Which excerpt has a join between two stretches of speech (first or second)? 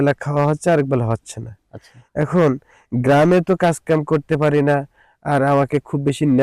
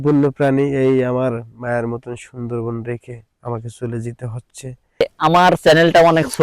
second